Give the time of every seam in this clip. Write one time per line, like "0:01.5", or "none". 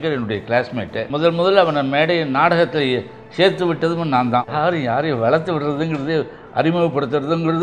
0:01.0
0:04.5